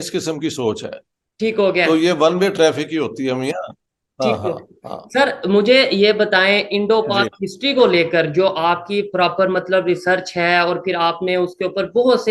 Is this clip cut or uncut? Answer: uncut